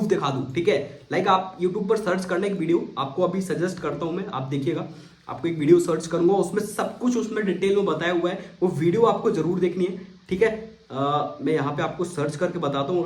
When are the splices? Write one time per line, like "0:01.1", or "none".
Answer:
none